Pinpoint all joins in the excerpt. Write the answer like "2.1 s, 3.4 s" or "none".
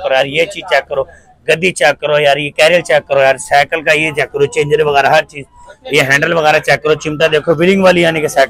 none